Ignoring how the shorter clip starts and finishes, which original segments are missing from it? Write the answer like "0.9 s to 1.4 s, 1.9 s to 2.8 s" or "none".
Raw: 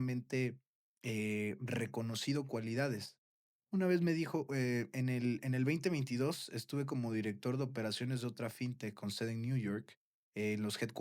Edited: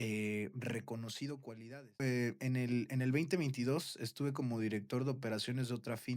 3.0 s to 4.5 s